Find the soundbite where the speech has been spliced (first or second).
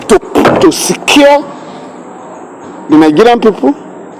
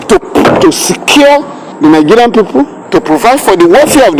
second